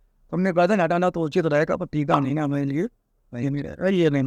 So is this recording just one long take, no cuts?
yes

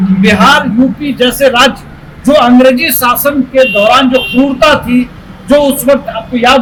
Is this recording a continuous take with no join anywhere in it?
yes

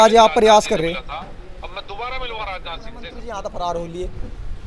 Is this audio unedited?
no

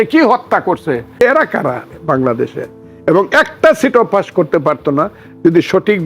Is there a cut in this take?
yes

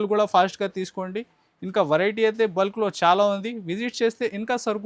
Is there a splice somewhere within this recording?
no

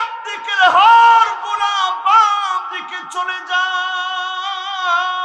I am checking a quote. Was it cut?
no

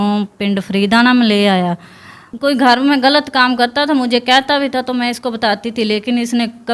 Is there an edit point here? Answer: yes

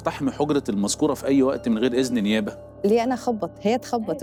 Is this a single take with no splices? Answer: yes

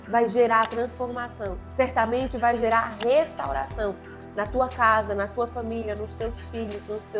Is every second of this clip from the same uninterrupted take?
yes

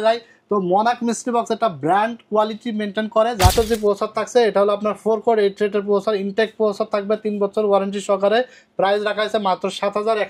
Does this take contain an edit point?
yes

